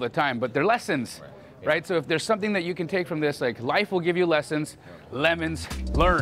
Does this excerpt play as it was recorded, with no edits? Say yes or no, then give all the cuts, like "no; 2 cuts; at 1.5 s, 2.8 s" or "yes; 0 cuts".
yes; 0 cuts